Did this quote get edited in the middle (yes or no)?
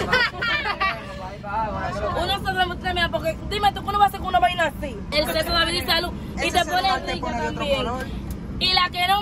yes